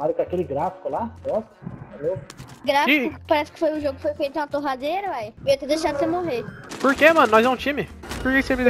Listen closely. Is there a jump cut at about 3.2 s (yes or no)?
no